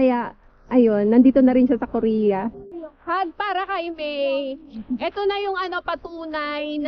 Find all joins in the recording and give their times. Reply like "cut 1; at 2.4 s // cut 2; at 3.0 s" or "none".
cut 1; at 2.7 s